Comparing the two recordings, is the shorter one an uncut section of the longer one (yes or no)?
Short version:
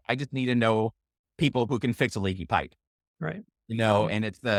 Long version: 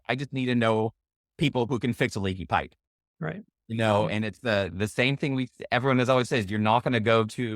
yes